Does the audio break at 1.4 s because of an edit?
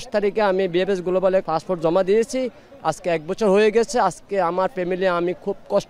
yes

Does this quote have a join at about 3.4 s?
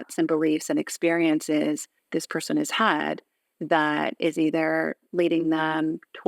no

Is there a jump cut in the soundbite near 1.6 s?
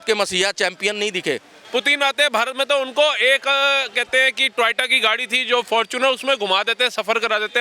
yes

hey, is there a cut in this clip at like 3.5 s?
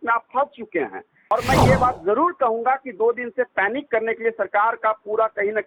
no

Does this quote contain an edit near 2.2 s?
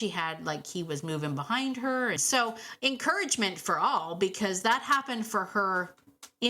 yes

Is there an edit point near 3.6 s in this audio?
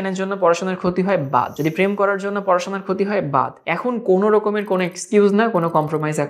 yes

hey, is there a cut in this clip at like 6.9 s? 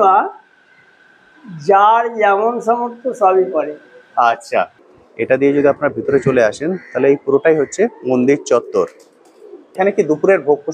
no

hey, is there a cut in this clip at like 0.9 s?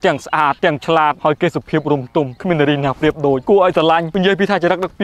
yes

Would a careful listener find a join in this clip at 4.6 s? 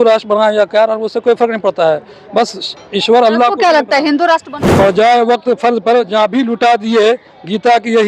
yes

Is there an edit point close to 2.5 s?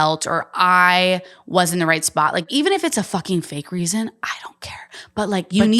yes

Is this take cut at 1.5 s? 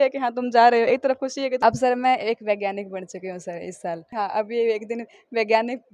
yes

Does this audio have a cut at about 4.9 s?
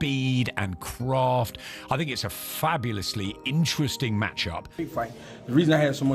yes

